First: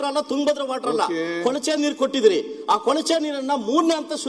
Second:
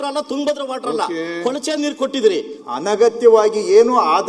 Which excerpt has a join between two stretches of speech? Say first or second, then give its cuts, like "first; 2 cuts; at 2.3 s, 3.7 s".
second; 1 cut; at 2.5 s